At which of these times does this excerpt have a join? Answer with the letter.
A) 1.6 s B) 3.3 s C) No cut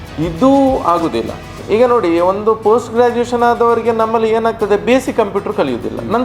A